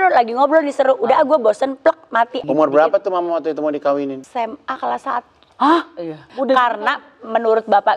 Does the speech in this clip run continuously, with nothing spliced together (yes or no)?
no